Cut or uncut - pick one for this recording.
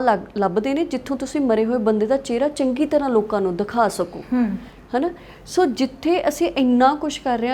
uncut